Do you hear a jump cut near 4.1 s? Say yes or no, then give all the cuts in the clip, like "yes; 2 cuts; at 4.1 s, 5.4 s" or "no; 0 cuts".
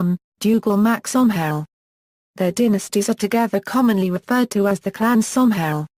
no; 1 cut; at 2.8 s